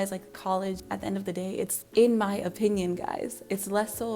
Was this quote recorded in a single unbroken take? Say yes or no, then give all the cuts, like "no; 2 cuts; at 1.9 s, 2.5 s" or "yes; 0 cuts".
yes; 0 cuts